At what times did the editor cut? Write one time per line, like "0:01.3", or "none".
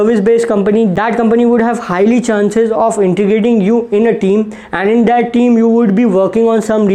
0:00.9